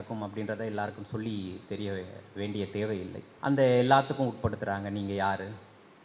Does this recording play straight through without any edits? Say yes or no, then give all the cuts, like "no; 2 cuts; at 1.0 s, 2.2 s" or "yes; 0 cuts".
no; 1 cut; at 3.3 s